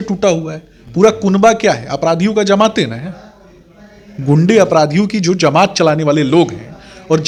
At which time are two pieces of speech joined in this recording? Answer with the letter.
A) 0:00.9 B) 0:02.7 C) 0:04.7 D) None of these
D